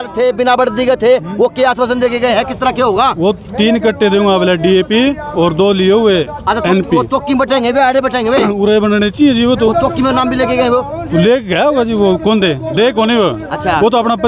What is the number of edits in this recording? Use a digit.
0